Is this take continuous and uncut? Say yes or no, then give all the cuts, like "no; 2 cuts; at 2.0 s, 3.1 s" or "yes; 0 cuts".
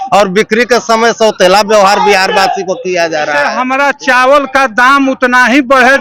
no; 1 cut; at 3.5 s